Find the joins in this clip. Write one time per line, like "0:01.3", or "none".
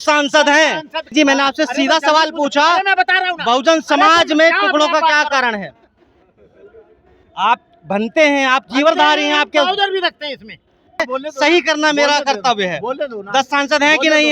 0:01.1
0:11.0